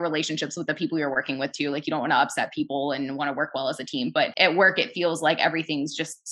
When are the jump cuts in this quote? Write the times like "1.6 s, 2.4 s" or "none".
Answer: 4.3 s